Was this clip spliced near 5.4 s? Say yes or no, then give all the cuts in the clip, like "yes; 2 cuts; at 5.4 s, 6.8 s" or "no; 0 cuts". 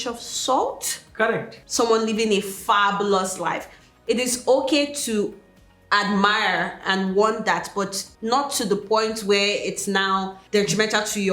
no; 3 cuts; at 1.6 s, 8.1 s, 10.4 s